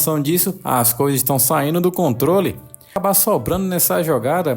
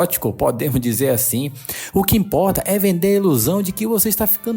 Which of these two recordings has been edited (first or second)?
first